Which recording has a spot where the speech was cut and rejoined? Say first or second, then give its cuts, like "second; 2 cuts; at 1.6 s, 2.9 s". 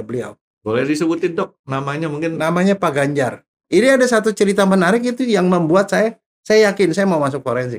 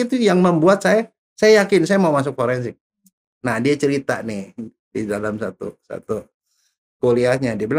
first; 1 cut; at 3.6 s